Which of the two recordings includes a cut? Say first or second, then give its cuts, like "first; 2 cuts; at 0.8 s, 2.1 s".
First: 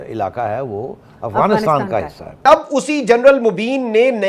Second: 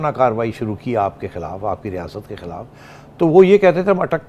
first; 1 cut; at 2.5 s